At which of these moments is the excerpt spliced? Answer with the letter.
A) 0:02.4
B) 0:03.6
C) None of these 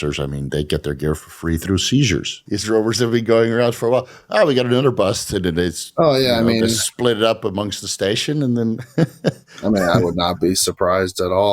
A